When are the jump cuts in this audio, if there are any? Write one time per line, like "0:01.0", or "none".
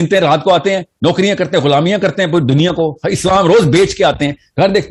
none